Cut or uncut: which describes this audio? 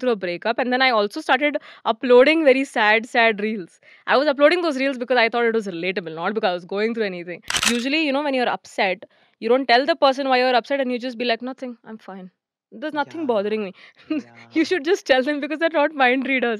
cut